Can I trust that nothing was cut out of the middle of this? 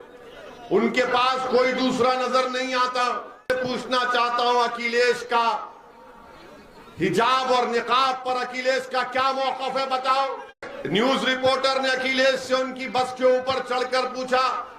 no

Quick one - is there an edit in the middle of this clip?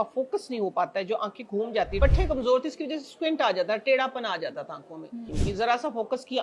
yes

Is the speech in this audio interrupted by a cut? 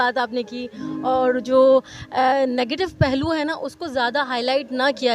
no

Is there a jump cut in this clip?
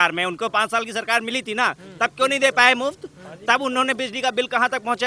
no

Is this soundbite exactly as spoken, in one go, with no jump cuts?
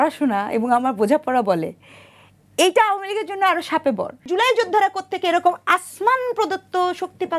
no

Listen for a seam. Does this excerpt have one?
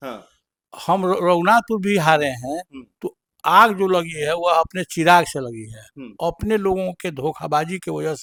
no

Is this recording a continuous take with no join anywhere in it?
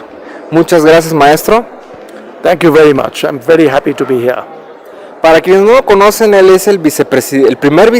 no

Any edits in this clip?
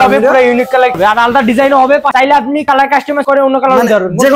yes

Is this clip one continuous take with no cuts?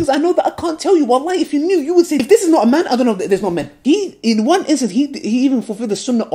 yes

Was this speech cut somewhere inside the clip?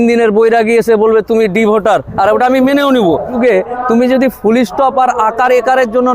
yes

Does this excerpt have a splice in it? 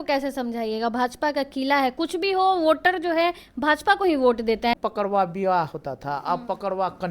yes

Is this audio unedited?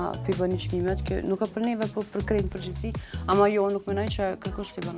yes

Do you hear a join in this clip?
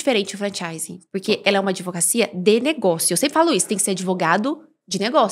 no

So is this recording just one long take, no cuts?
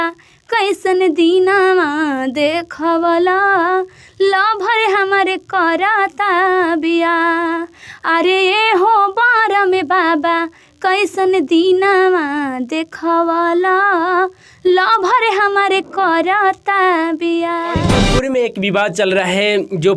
no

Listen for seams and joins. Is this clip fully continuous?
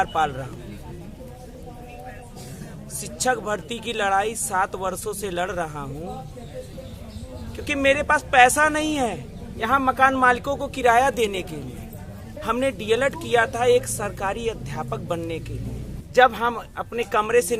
no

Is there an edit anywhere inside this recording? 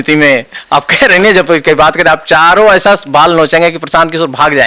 no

